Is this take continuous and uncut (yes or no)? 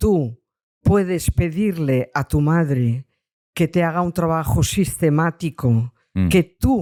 yes